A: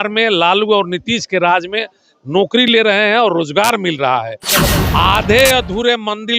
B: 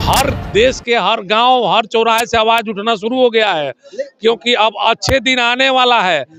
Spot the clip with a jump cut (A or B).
A